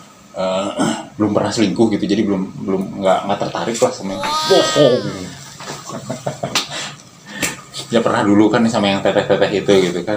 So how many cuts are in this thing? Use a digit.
0